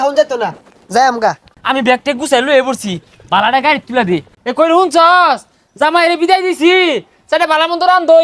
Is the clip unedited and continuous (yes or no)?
no